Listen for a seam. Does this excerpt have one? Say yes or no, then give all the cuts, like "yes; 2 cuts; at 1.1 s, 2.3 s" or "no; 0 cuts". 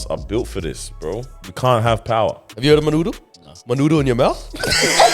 yes; 2 cuts; at 1.4 s, 2.5 s